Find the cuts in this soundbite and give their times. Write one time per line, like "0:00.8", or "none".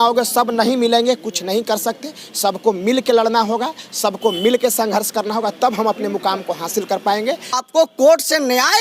0:07.6